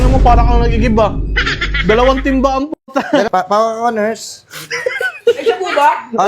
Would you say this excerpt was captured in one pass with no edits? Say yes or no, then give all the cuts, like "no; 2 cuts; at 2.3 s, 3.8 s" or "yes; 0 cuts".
no; 1 cut; at 3.3 s